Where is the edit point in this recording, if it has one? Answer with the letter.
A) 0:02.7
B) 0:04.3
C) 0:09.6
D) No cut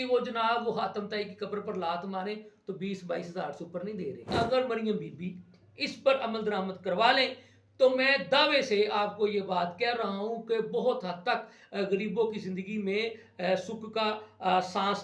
B